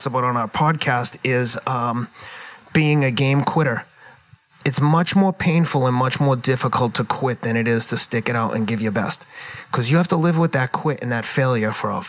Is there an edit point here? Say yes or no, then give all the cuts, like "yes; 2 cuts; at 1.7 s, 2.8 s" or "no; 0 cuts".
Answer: no; 0 cuts